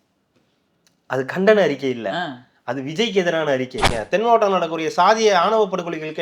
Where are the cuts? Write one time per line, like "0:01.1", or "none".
0:04.0